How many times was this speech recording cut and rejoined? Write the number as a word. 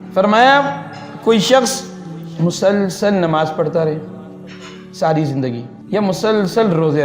one